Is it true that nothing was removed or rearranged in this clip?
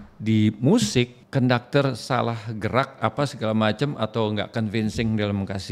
no; 1 cut; at 1.2 s

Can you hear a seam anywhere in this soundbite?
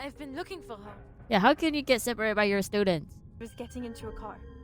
yes; 1 cut; at 3.4 s

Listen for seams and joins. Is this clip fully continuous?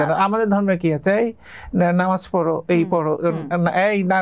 yes; 0 cuts

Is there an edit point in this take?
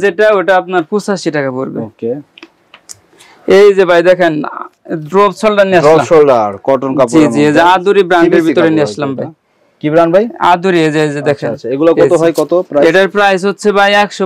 no; 0 cuts

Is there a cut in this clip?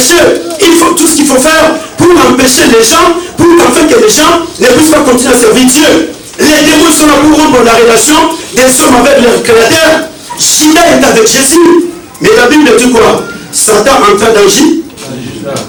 no; 0 cuts

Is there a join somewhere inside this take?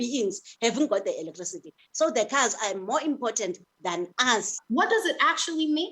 yes; 1 cut; at 4.6 s

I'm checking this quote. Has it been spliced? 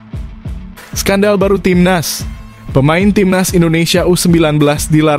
yes; 1 cut; at 1.0 s

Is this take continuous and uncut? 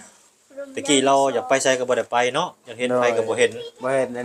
yes; 0 cuts

